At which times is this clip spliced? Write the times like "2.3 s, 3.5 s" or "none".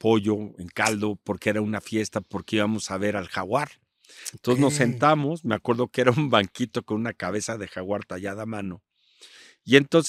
none